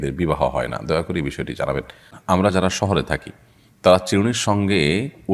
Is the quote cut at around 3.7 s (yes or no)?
no